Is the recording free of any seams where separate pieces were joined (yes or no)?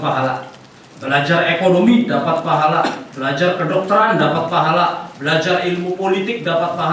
yes